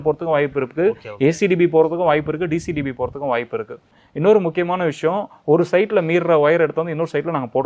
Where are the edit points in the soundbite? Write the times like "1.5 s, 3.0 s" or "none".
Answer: 4.0 s